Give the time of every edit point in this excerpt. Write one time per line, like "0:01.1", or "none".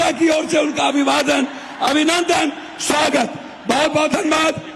none